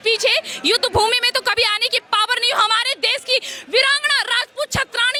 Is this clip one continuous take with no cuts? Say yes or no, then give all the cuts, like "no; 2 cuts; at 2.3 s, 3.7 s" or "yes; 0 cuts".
yes; 0 cuts